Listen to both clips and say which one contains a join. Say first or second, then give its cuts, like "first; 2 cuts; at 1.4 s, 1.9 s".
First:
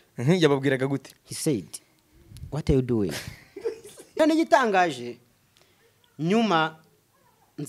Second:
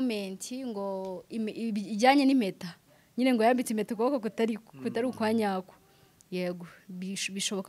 first; 1 cut; at 4.2 s